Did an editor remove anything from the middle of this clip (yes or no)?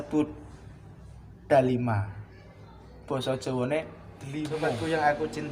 yes